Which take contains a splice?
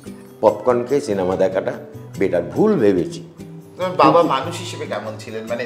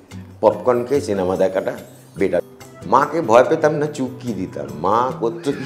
second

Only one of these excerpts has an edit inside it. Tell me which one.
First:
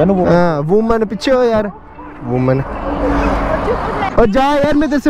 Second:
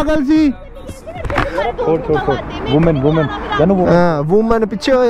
first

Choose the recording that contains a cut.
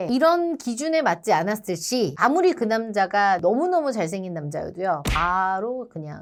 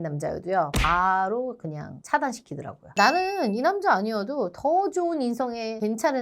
second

